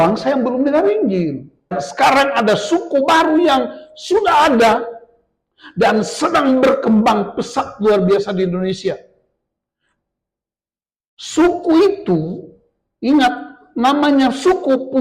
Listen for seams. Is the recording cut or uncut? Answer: cut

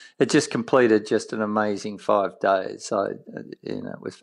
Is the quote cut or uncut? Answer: uncut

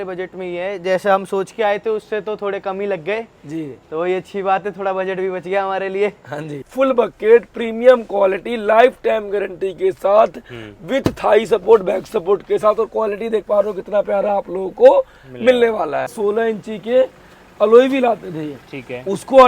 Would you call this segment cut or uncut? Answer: cut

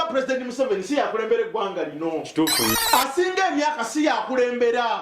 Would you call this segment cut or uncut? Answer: cut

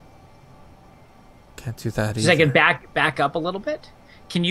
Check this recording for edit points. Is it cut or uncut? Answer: cut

